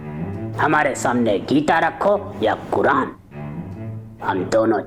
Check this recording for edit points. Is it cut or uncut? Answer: uncut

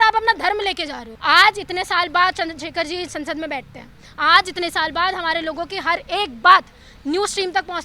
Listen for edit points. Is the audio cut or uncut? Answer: cut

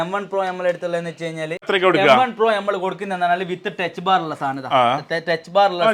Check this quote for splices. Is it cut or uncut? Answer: uncut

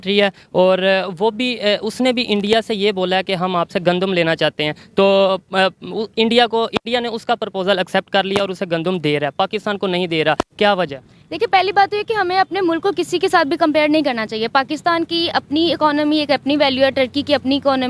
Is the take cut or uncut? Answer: uncut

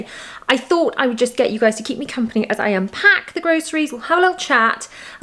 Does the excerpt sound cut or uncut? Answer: uncut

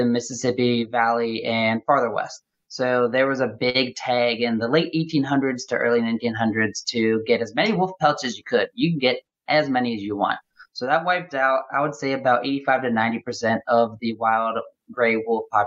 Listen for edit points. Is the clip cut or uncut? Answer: uncut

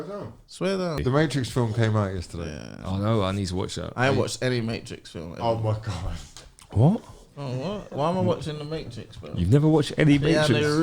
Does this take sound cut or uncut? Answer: cut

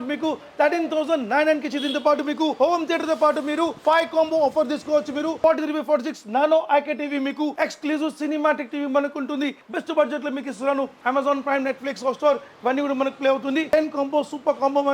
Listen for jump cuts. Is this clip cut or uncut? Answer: cut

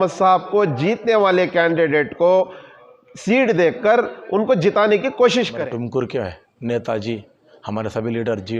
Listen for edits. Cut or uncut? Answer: cut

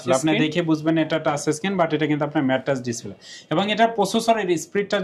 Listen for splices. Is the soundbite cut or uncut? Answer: uncut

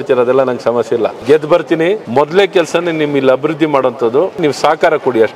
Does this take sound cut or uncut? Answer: cut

